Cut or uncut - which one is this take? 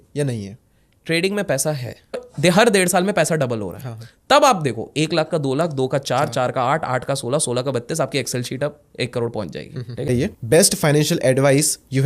cut